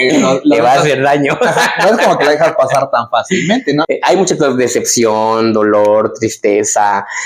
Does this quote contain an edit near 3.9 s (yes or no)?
yes